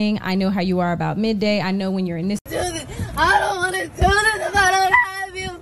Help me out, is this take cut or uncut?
cut